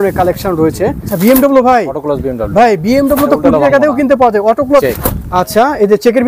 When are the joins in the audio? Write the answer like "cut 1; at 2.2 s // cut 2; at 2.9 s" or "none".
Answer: cut 1; at 1.1 s // cut 2; at 4.8 s